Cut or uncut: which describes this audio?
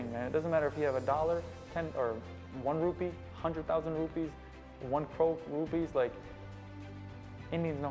uncut